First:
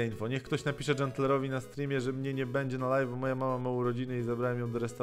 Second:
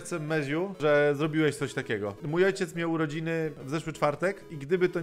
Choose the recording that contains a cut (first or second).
second